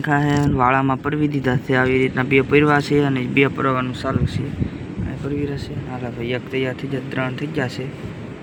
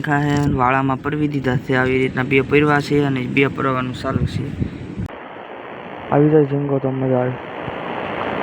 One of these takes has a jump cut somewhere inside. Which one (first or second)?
second